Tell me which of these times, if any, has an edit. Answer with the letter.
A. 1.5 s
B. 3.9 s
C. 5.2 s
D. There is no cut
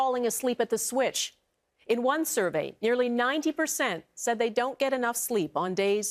B